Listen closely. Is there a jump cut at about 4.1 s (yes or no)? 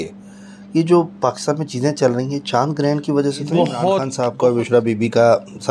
yes